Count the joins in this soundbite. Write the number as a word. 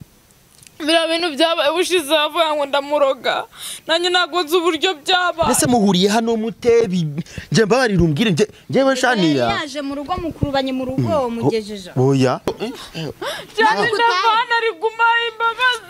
one